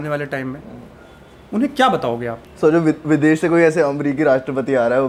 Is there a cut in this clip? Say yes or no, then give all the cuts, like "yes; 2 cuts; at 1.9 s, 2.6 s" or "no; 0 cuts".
yes; 1 cut; at 2.4 s